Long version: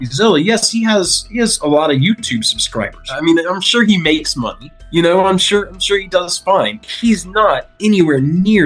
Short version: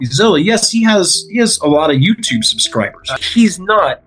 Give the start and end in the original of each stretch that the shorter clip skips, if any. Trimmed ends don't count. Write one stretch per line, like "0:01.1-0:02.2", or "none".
0:03.1-0:06.8

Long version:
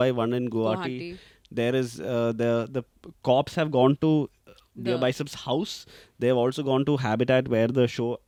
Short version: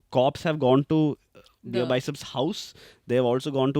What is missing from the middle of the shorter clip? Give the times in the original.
none

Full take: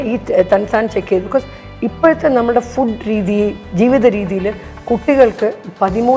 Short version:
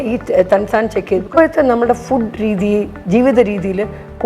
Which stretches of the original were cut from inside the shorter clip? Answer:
0:01.3-0:01.9

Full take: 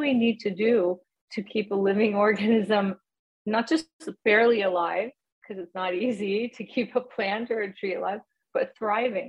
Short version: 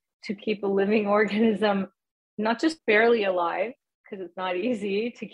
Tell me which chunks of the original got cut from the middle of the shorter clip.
0:03.9-0:04.2

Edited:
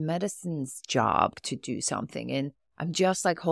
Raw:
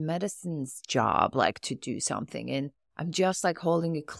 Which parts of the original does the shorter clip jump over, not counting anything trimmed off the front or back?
0:01.3-0:01.5

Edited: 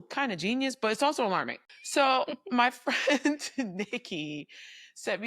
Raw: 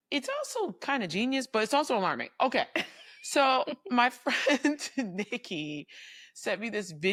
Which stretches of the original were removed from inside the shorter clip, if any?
0:02.3-0:02.9

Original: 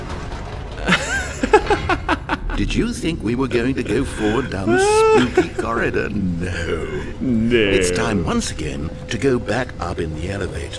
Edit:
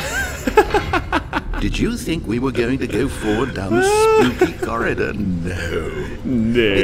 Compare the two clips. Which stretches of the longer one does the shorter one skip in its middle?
none

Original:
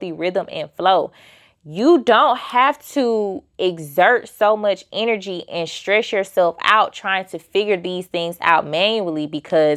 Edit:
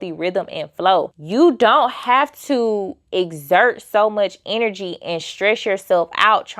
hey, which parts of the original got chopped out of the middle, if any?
0:01.2-0:01.6

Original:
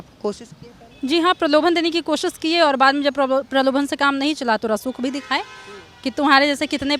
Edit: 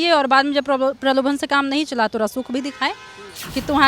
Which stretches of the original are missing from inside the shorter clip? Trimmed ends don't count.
none

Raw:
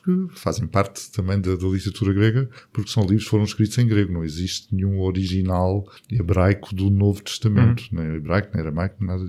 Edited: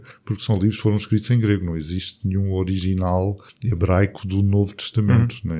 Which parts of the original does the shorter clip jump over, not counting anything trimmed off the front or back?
none

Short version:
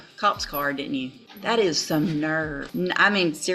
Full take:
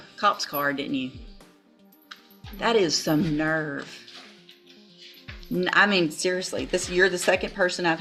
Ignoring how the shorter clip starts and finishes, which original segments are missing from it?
0:01.3-0:02.4
0:03.8-0:05.4

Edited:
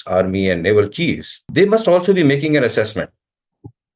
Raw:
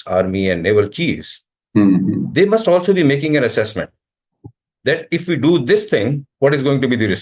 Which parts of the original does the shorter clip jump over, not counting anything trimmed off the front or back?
0:01.4-0:02.2

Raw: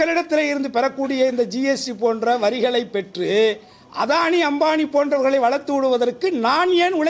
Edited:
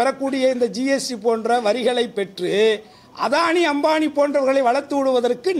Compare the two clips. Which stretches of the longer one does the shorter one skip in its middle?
none

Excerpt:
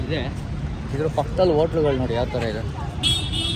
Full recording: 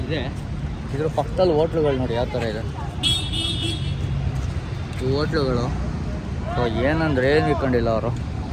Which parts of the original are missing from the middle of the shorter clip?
none

